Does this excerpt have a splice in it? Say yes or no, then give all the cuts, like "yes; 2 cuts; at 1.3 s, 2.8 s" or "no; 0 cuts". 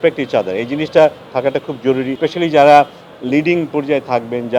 yes; 1 cut; at 2.1 s